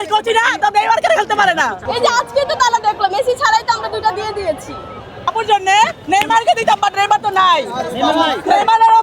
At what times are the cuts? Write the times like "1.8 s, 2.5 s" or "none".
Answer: 1.8 s, 5.1 s